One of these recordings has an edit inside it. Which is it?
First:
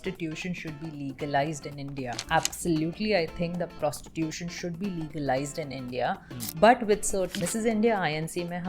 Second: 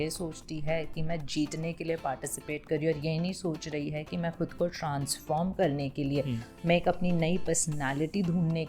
first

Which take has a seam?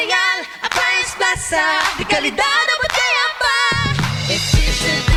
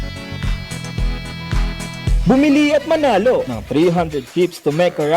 second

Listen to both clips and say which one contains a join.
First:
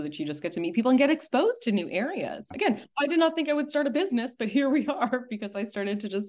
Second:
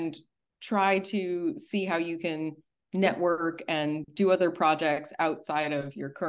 first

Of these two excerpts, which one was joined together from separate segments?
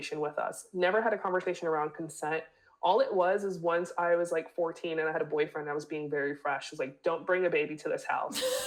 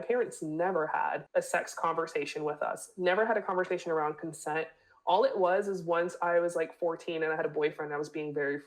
second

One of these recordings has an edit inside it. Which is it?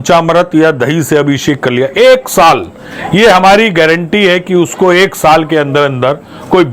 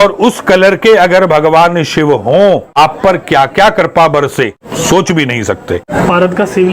second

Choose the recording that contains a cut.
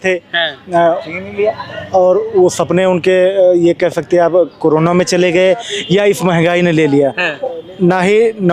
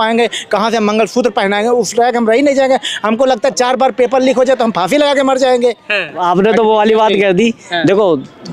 second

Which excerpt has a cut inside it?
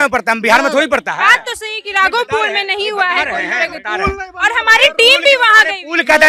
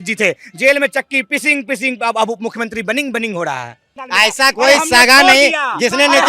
second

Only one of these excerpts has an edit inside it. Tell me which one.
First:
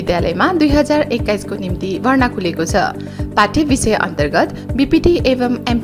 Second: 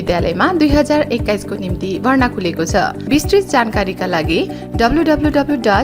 second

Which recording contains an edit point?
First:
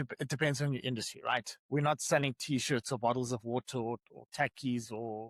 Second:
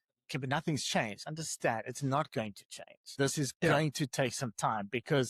second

